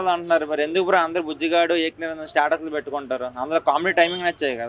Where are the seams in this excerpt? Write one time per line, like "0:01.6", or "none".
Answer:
none